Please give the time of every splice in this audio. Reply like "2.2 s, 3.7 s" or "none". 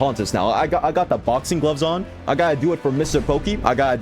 2.2 s